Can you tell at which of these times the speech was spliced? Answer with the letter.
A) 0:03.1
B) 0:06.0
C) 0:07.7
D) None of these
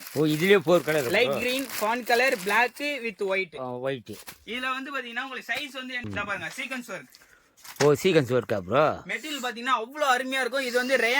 B